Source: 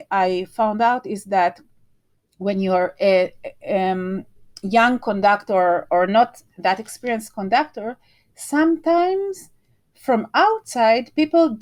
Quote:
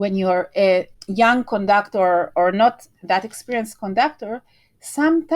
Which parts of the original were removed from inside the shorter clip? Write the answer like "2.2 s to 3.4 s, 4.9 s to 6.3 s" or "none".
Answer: 3.4 s to 4.5 s

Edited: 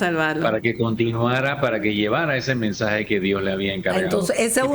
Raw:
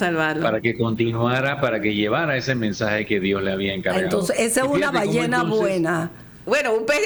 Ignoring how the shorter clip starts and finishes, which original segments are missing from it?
none

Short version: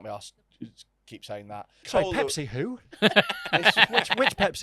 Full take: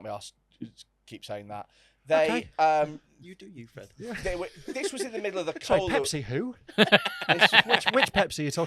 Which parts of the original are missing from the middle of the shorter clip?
1.8 s to 5.6 s

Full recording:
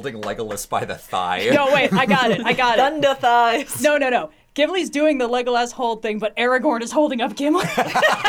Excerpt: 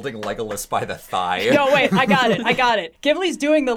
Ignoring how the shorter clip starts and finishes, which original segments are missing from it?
2.8 s to 4.3 s

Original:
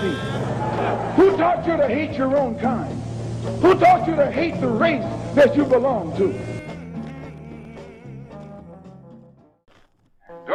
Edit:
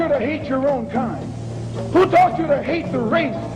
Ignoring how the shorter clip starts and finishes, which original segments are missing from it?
none

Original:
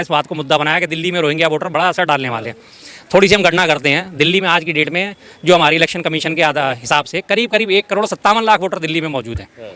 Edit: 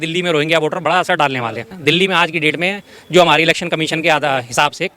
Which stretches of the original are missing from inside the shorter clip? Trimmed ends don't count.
2.6 s to 4.1 s

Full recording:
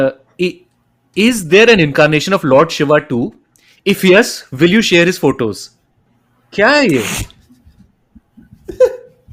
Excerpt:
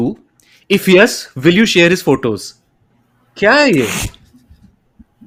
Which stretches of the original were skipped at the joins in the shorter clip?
none

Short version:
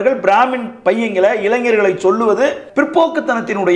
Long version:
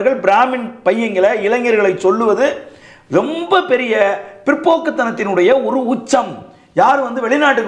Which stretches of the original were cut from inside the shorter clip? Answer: 2.6 s to 4.3 s

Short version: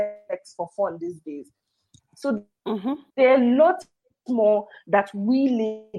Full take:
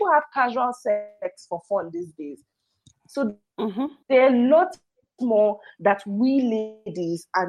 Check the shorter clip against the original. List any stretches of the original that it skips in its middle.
none

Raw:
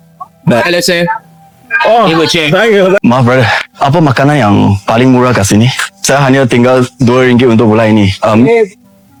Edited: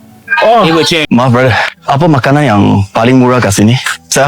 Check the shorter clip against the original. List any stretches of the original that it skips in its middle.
2.5 s to 3.0 s

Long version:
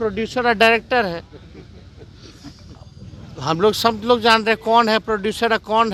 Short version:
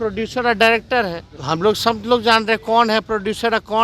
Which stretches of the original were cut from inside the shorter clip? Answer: 1.3 s to 3.3 s

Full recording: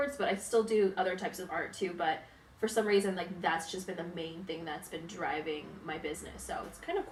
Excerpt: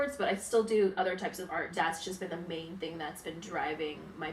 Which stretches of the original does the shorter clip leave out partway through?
1.7 s to 3.4 s

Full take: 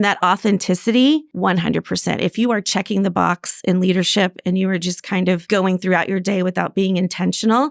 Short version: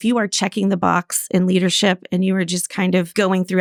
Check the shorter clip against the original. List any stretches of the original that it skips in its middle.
none

